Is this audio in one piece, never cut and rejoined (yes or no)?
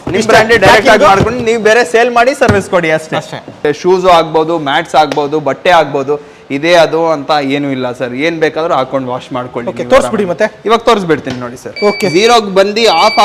no